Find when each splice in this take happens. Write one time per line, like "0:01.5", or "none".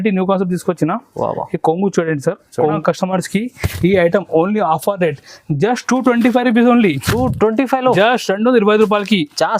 0:02.8

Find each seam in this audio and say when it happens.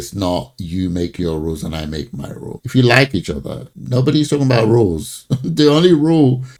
none

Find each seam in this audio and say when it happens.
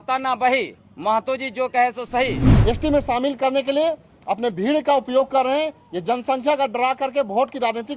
0:02.5

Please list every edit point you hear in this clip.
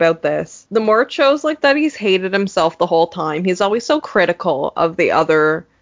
none

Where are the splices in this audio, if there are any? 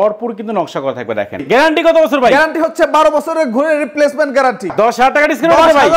0:01.4
0:04.7

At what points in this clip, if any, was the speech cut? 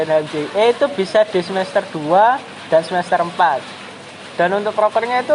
none

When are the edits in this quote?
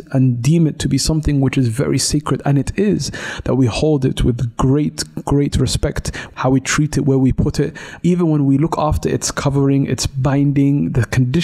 0:06.2
0:07.9

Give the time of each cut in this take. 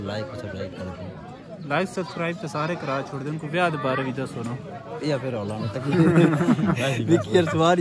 0:06.8

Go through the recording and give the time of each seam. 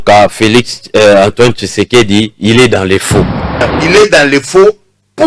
0:03.7

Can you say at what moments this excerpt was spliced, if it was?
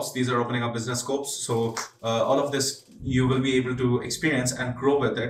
none

